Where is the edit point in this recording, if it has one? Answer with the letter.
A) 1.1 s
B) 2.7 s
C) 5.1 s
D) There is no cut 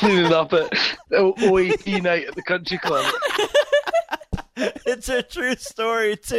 D